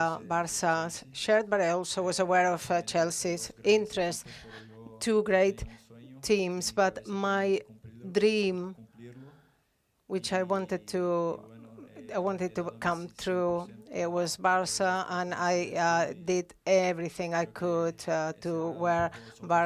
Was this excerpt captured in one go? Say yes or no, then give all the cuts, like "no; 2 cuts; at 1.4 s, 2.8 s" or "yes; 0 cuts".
yes; 0 cuts